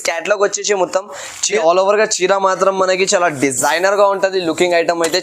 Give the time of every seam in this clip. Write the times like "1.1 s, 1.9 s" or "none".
1.5 s